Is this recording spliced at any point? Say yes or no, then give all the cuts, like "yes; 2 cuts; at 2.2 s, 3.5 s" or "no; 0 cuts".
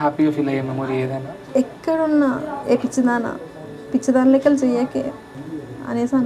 yes; 2 cuts; at 1.3 s, 5.3 s